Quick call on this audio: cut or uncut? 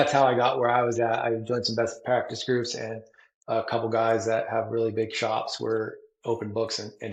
uncut